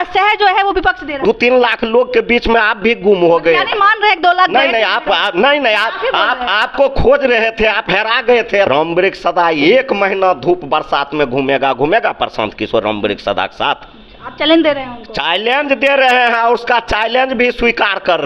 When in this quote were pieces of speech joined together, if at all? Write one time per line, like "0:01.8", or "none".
0:01.2
0:08.7